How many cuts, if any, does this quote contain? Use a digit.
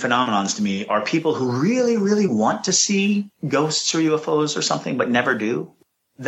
0